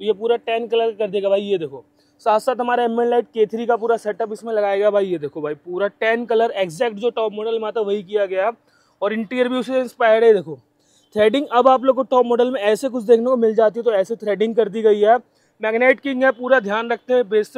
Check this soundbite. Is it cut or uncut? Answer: uncut